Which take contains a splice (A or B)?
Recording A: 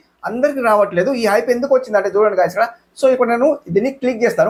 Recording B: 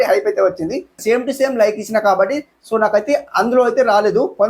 B